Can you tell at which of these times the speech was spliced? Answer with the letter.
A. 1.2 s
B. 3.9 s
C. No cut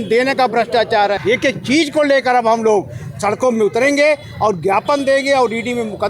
A